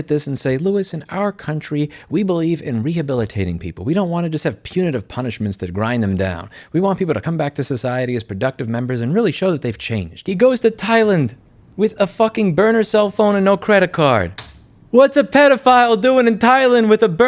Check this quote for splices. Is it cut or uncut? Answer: uncut